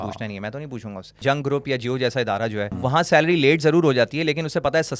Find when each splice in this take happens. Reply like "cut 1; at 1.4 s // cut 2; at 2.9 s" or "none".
cut 1; at 1.2 s // cut 2; at 2.7 s